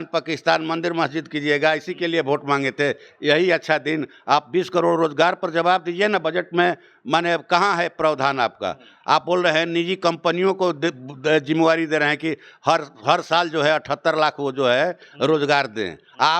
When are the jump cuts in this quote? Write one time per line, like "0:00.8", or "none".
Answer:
none